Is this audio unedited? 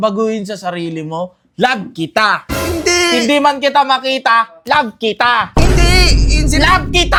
yes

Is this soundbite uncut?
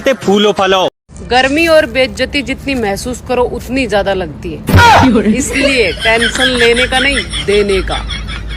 no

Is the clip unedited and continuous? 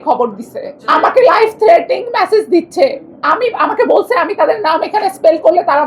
yes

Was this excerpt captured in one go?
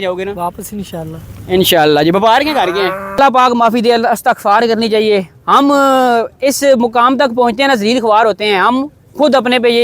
no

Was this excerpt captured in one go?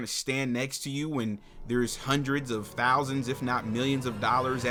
yes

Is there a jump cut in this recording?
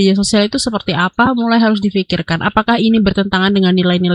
no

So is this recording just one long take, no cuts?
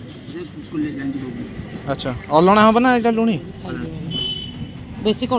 no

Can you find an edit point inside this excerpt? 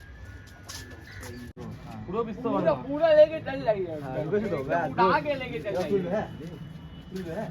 yes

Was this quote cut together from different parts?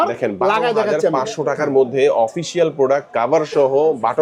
no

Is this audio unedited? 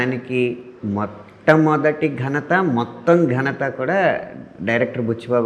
yes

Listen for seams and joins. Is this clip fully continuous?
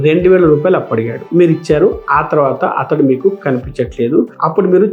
yes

